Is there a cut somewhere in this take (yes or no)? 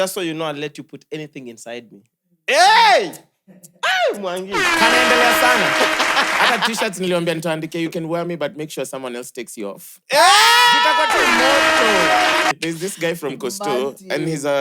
yes